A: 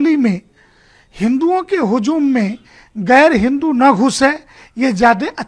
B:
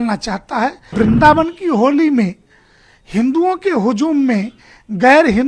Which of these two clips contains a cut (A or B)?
B